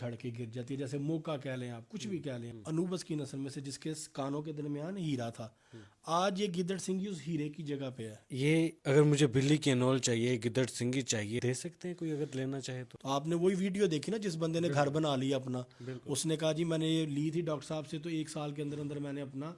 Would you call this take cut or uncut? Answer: cut